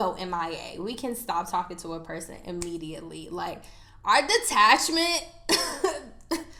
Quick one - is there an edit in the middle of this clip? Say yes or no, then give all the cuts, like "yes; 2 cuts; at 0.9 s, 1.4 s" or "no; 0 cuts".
no; 0 cuts